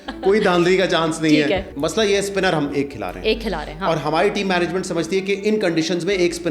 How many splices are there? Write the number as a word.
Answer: one